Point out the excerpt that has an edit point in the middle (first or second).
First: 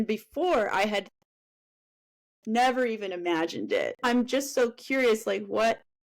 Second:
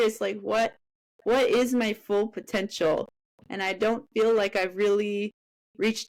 first